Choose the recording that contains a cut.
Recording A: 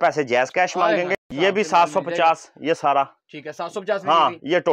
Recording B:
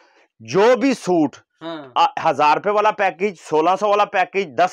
A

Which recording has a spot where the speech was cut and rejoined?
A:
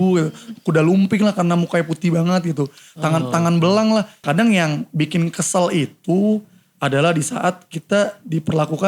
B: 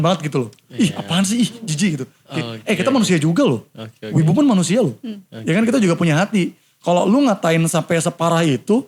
A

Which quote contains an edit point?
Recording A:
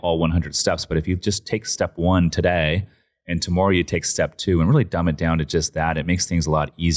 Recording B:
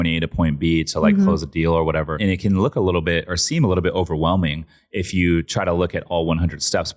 B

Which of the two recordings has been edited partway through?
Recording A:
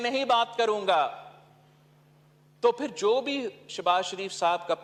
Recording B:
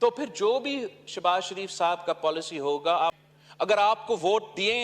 B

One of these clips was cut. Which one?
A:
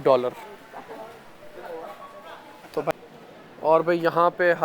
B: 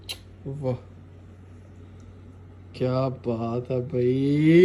A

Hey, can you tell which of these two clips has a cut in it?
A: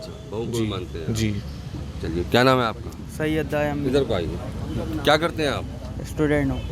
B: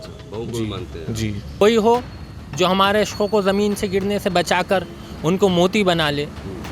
B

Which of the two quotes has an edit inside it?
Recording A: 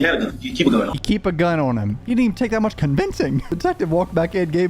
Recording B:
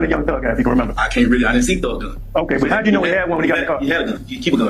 A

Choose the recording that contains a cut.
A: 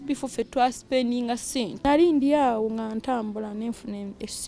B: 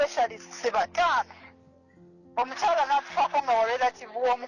A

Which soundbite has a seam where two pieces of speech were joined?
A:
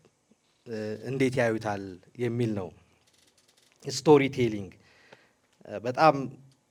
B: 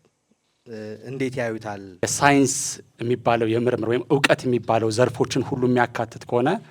B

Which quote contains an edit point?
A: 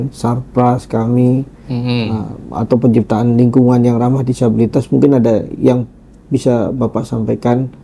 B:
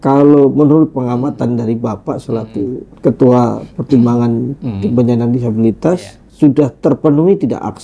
B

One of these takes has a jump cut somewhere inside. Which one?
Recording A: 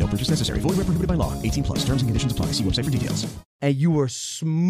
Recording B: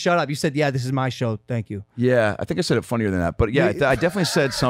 A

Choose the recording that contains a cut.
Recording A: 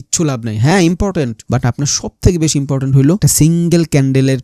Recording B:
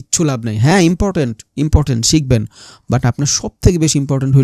A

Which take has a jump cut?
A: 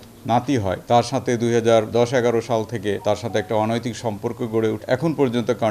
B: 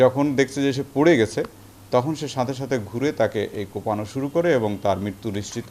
A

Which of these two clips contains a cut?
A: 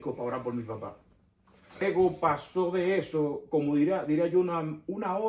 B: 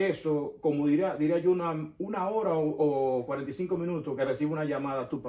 A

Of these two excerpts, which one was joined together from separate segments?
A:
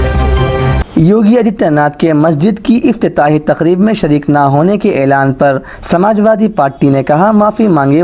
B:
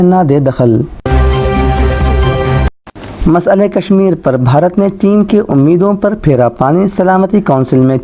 B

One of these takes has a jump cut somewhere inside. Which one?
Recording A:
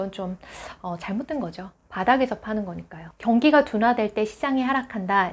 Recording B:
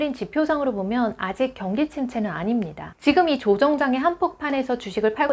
B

